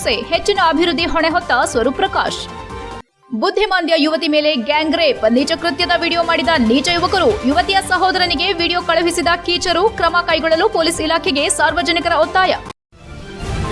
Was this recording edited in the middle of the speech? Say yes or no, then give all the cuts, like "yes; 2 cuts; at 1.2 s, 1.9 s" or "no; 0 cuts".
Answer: yes; 1 cut; at 12.7 s